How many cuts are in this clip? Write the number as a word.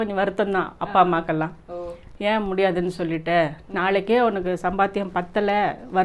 zero